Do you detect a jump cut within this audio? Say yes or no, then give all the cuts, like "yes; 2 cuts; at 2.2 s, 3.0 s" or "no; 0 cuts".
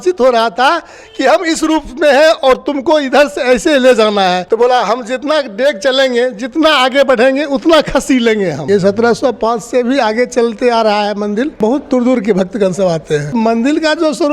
yes; 4 cuts; at 4.4 s, 8.6 s, 11.6 s, 13.3 s